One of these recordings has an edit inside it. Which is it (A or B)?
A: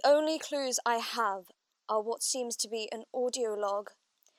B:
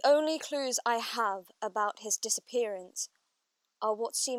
A